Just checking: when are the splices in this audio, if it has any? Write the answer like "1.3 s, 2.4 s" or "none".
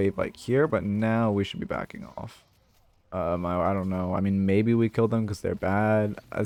none